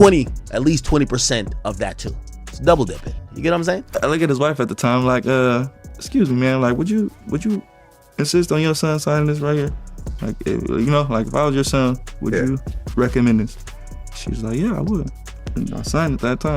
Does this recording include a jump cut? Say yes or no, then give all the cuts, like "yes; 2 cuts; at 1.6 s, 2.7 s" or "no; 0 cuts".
yes; 1 cut; at 3.8 s